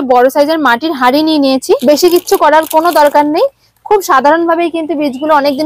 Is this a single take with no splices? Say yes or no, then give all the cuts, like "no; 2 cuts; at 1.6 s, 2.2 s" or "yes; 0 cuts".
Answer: no; 1 cut; at 1.8 s